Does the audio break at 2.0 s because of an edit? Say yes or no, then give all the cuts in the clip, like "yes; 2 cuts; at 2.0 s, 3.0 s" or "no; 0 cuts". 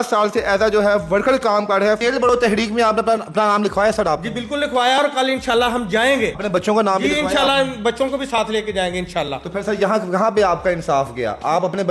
yes; 2 cuts; at 2.0 s, 6.4 s